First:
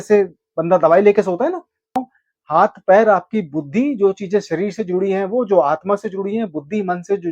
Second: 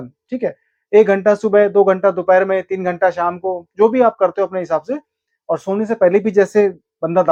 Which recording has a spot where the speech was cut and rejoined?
first; 1 cut; at 2.0 s

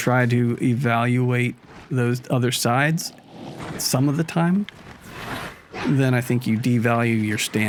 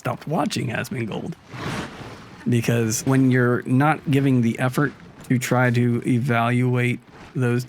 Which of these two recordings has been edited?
second; 1 cut; at 3.0 s

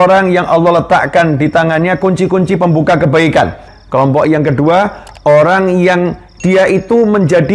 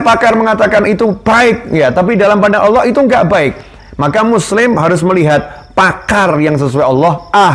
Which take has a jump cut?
first; 1 cut; at 3.7 s

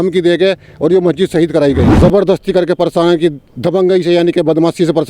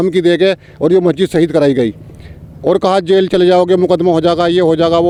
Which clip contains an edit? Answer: first; 1 cut; at 1.9 s

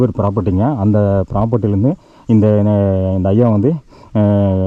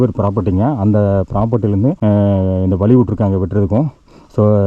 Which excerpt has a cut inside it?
second; 1 cut; at 1.8 s

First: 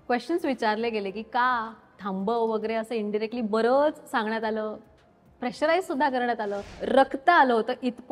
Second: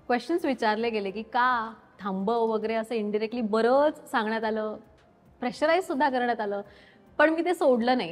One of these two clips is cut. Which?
first; 1 cut; at 6.7 s

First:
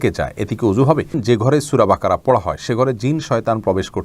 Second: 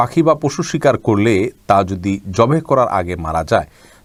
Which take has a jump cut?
first; 1 cut; at 1.2 s

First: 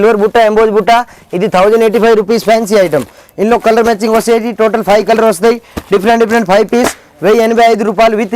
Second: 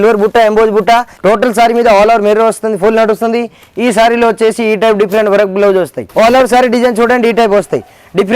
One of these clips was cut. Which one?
second; 2 cuts; at 1.1 s, 6.0 s

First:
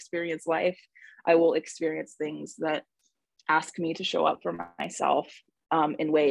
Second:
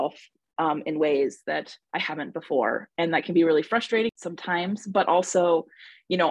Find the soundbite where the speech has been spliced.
second; 1 cut; at 4.2 s

